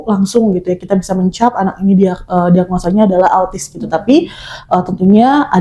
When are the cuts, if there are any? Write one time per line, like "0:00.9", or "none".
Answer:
none